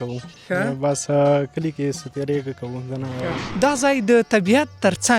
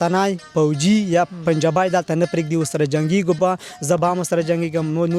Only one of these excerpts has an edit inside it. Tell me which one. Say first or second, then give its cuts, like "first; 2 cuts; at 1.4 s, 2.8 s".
first; 1 cut; at 3.4 s